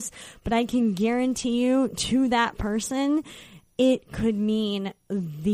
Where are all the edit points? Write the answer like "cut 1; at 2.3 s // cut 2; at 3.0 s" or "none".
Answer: none